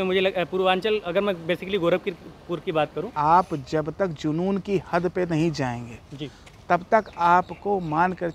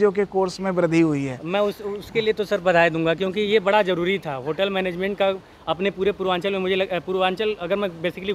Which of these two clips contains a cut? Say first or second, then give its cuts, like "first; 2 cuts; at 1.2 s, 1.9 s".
first; 1 cut; at 3.1 s